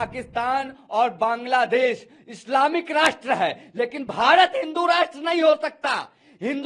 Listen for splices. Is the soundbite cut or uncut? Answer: uncut